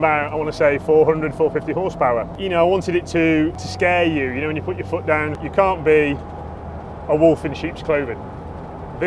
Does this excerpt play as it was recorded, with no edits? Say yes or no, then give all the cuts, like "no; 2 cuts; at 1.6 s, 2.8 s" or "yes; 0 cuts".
no; 3 cuts; at 2.3 s, 3.6 s, 5.4 s